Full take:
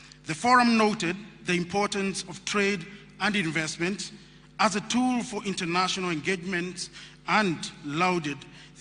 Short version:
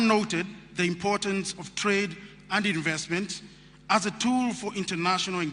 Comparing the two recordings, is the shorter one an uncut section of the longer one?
yes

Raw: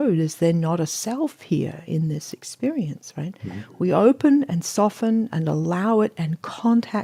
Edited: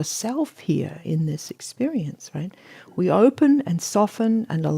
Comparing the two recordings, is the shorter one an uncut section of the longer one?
yes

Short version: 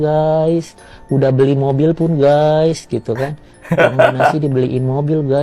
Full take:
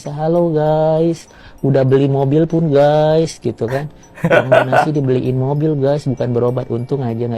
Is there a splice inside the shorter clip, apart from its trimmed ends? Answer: no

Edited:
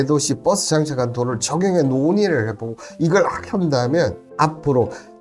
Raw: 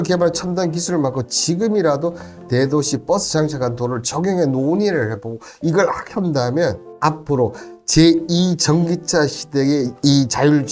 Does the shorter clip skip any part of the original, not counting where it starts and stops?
no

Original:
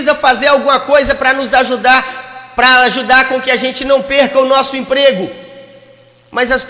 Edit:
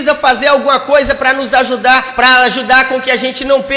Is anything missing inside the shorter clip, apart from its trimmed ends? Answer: yes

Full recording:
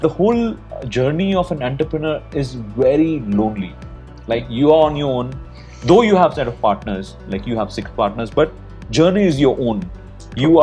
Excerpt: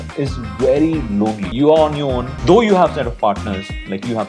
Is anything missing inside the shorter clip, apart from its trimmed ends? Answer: yes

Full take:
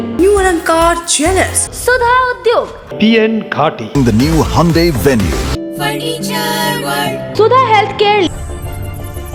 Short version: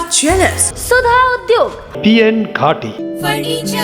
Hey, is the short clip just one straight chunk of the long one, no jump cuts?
no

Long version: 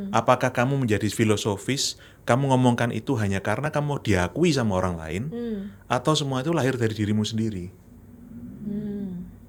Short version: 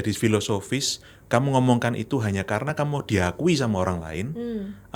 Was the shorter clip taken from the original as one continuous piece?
yes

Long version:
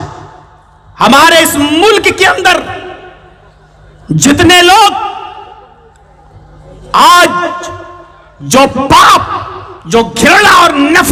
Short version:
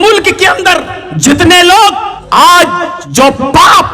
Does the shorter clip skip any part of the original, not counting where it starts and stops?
yes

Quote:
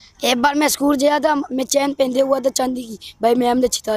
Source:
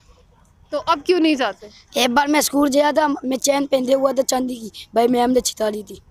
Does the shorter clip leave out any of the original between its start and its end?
no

